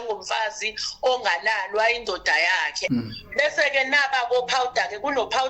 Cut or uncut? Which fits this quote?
cut